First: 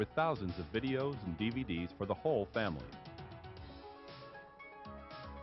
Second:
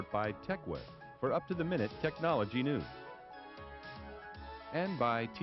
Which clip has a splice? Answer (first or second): first